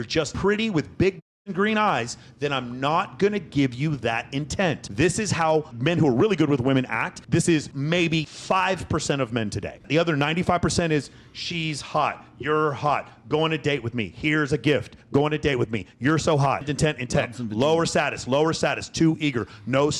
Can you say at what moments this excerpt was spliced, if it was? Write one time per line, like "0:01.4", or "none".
0:08.0
0:09.9
0:16.7